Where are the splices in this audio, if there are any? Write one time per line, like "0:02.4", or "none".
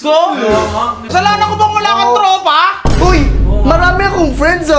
0:01.1